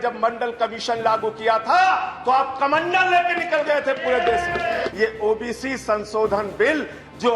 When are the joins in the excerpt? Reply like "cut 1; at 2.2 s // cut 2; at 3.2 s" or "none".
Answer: cut 1; at 4.9 s